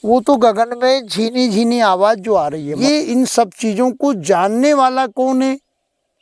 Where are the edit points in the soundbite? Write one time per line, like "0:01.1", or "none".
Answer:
0:02.7